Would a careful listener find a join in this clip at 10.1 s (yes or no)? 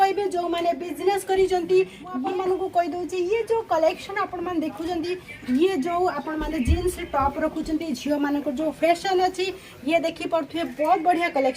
no